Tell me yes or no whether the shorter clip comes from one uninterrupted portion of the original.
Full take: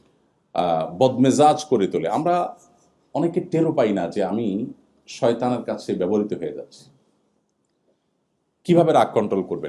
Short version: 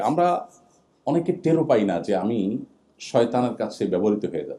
yes